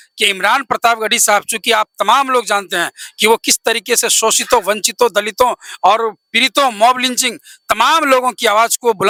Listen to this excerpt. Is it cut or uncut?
uncut